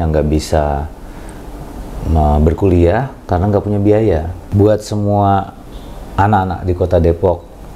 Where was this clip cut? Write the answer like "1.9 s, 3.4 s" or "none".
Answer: 4.4 s